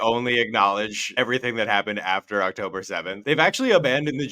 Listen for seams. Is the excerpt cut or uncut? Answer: cut